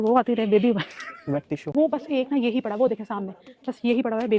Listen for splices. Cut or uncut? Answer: cut